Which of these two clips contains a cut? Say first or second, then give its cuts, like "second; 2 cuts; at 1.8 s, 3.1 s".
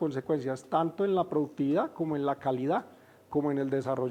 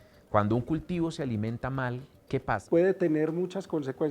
second; 1 cut; at 2.6 s